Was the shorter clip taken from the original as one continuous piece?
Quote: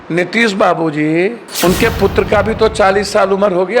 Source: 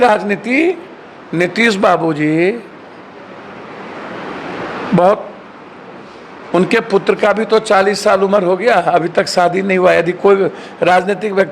no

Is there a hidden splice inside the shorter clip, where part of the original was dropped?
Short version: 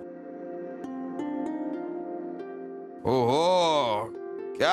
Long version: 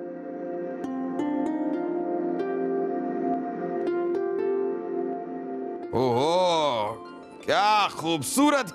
yes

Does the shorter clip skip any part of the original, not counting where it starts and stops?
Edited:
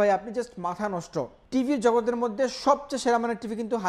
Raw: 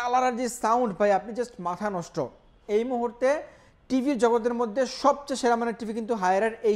yes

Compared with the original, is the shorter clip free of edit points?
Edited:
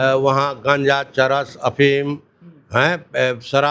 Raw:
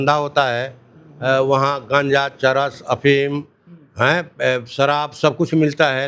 yes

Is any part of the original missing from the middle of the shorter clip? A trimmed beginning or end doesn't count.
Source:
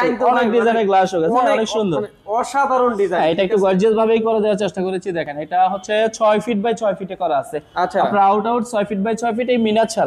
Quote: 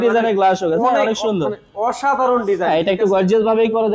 no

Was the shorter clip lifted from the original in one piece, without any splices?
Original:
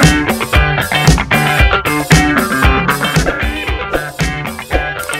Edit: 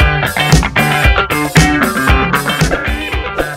yes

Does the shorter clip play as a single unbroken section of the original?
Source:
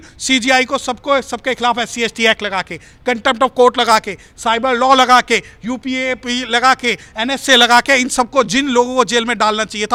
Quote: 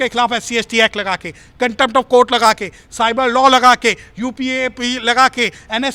yes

